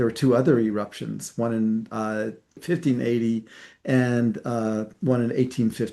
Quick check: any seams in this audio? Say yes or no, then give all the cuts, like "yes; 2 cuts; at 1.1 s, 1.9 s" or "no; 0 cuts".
no; 0 cuts